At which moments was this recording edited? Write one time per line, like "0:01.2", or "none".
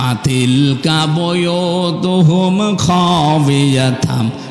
none